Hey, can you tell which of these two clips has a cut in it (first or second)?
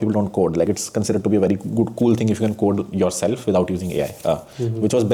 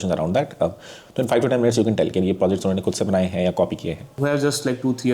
second